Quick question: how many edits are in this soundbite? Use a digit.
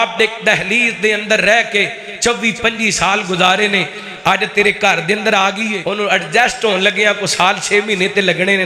1